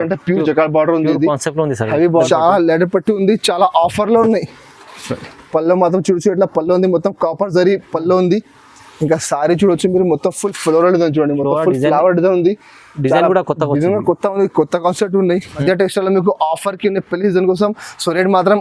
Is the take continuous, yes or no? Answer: no